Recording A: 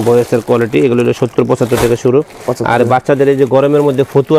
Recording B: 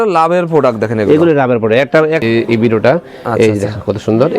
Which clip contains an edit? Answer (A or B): B